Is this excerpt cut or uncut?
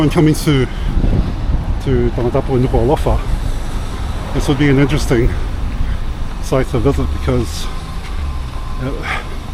uncut